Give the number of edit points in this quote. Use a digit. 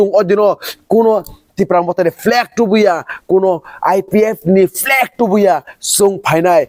0